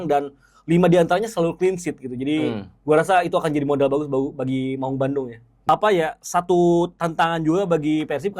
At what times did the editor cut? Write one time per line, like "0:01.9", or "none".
0:05.4